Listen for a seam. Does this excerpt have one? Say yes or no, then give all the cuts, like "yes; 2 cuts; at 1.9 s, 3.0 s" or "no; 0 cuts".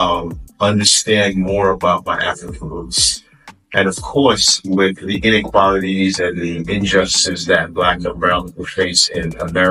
no; 0 cuts